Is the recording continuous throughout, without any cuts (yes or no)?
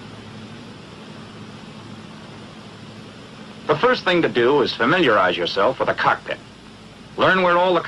yes